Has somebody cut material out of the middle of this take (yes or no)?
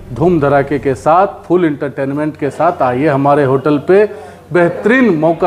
no